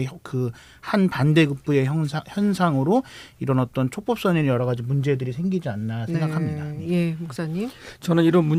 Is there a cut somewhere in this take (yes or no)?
no